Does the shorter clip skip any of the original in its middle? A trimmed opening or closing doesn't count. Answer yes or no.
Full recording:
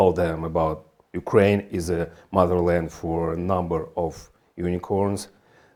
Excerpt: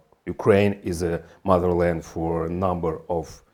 no